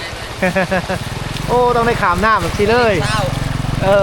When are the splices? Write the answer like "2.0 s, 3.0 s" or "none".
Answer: none